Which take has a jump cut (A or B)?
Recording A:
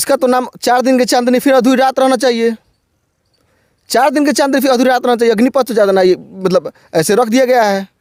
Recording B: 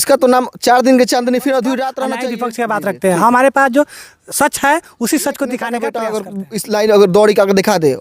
B